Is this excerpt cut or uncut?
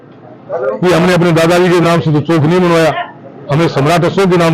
uncut